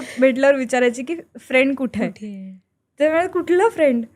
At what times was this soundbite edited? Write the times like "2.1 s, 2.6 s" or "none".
none